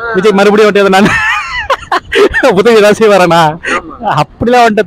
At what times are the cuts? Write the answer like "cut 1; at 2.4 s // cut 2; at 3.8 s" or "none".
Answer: none